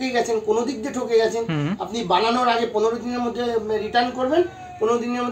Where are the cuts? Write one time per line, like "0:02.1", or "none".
none